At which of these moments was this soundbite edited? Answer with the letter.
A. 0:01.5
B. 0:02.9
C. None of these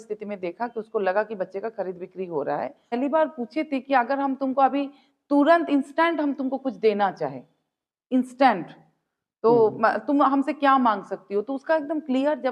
B